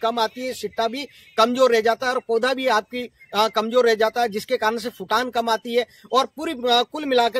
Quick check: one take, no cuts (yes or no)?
yes